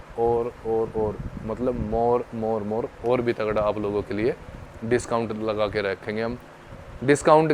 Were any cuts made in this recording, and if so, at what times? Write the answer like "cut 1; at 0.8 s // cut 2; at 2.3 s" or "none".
none